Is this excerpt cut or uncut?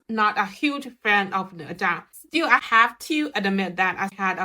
cut